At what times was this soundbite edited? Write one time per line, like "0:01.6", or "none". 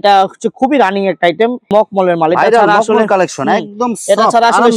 0:01.6